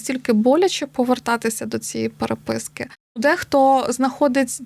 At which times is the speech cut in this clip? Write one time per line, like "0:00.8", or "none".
0:03.2